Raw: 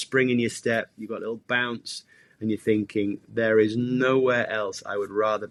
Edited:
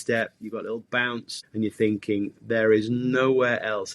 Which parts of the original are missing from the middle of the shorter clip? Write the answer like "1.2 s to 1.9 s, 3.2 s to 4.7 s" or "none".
1.9 s to 2.2 s